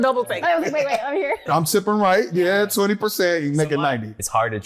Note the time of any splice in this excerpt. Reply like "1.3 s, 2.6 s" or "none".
none

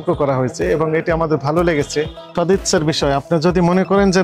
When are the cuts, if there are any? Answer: 2.3 s

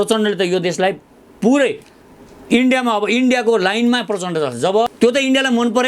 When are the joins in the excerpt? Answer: 4.9 s

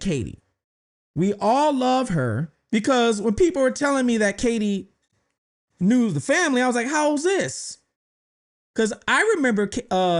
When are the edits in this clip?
2.5 s

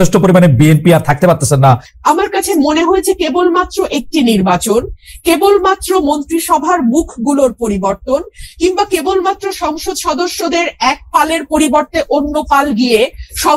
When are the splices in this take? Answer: 1.9 s

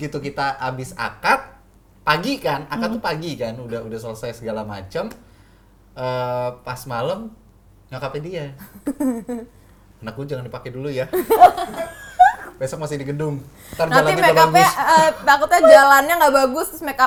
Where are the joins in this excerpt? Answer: none

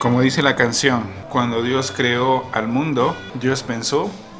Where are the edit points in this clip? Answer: 1.2 s, 3.3 s

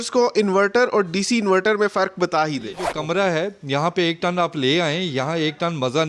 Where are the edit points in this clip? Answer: 2.9 s

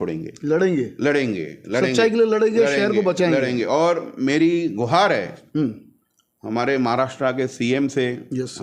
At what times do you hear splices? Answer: none

